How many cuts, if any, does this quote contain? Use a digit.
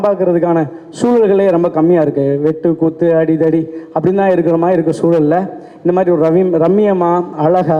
0